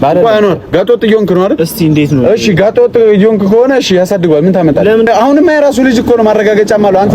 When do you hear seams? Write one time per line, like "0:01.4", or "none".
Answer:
0:05.1